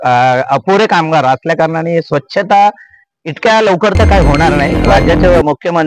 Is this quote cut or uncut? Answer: cut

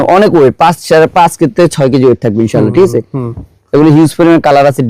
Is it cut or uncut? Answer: uncut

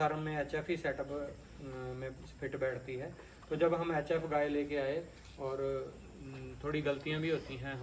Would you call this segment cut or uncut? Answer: uncut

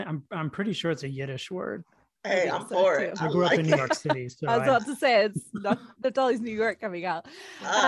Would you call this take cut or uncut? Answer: uncut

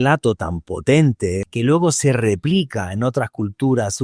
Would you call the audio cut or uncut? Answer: cut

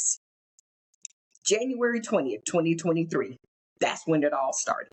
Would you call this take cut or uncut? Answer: uncut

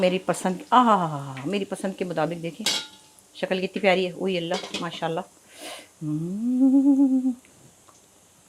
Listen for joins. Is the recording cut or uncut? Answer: uncut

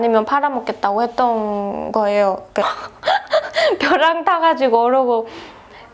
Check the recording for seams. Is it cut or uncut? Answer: cut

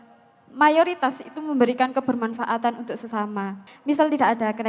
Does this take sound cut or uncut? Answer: cut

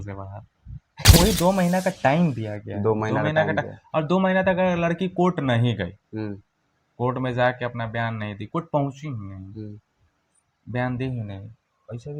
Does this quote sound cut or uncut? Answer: cut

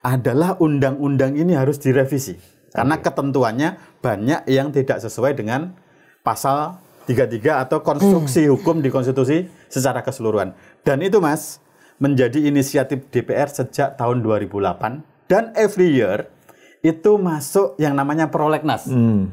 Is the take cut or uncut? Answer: uncut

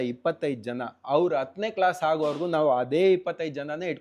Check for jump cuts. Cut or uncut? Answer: uncut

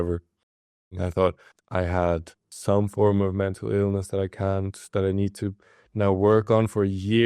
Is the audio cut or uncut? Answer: cut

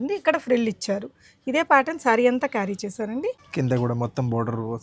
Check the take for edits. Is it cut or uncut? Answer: cut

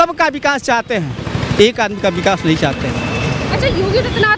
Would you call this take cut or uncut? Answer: uncut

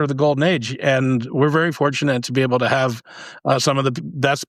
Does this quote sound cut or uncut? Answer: uncut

